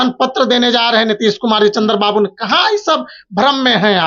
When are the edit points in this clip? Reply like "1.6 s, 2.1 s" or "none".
none